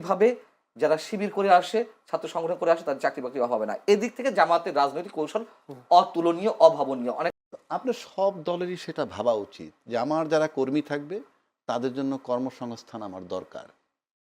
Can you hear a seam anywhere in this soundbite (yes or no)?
yes